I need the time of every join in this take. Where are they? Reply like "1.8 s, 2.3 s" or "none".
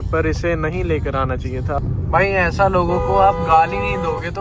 1.8 s